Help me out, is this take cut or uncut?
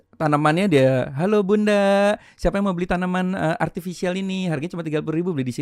uncut